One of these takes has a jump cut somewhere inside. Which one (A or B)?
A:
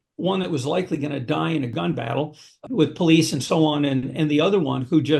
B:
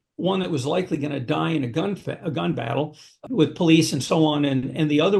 A